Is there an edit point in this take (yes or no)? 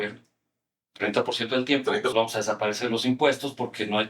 yes